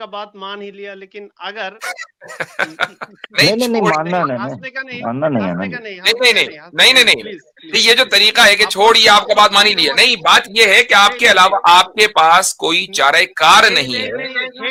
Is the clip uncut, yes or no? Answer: yes